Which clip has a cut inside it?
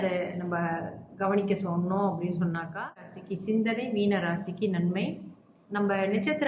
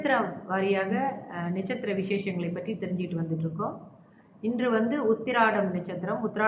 first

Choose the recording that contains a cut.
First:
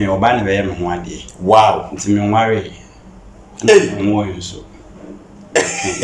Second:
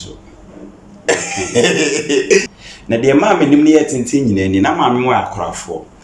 second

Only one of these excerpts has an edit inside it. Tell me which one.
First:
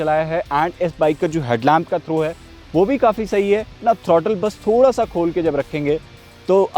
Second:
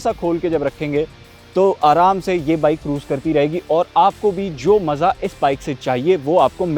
first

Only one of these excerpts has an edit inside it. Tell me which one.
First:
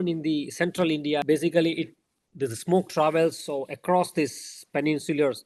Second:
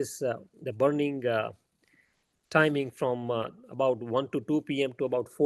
first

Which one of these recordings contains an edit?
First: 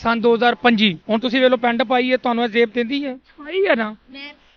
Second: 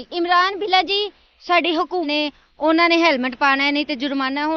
second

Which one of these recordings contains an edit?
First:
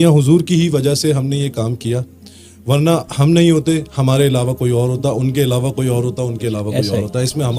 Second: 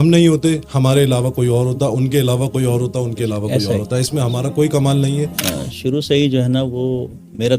second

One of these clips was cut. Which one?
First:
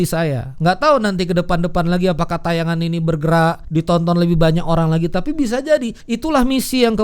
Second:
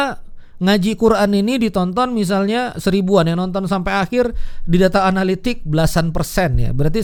first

